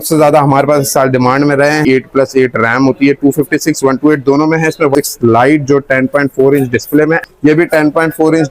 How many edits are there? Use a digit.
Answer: 3